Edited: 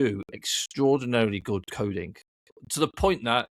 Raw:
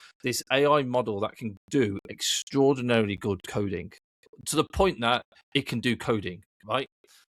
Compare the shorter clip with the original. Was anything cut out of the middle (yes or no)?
no